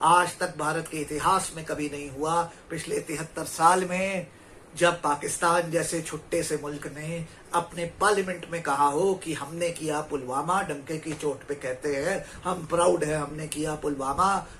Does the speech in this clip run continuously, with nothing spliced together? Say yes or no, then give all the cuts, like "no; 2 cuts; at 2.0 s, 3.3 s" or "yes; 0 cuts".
yes; 0 cuts